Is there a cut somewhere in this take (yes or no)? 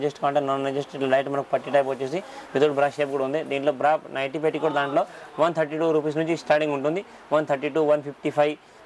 no